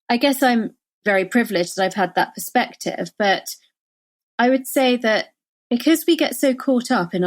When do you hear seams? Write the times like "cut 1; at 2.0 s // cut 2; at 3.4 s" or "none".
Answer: cut 1; at 1.0 s